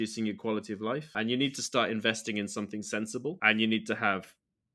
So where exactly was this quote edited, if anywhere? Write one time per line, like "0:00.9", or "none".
0:01.1
0:03.4